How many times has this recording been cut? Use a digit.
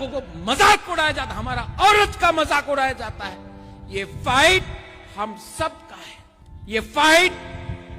0